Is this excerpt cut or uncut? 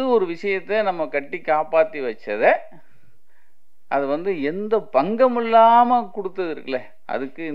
uncut